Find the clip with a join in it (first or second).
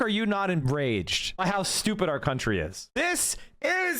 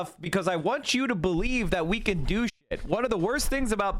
first